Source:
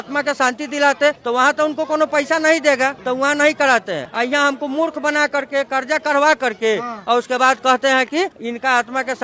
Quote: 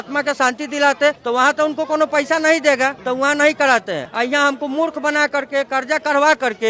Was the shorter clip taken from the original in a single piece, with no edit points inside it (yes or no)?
yes